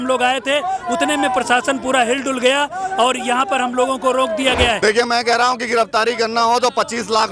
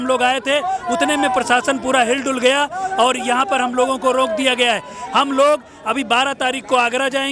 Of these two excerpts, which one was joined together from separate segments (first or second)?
first